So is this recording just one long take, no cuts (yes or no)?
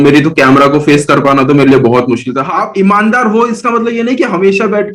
no